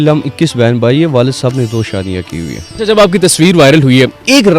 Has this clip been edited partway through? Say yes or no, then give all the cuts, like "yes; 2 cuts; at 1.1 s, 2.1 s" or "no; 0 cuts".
yes; 1 cut; at 2.6 s